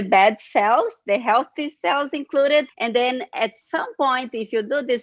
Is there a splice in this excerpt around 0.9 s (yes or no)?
no